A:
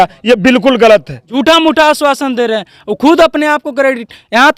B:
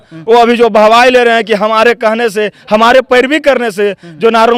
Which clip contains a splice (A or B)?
A